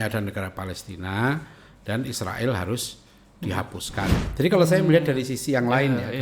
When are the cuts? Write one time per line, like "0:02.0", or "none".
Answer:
0:04.2